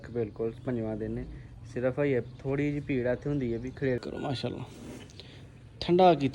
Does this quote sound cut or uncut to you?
cut